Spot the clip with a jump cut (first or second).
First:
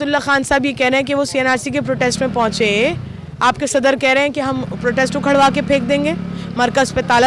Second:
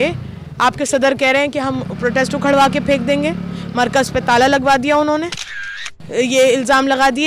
second